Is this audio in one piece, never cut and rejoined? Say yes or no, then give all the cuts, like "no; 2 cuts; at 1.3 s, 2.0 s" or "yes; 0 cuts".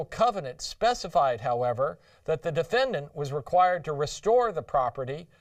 no; 1 cut; at 3.4 s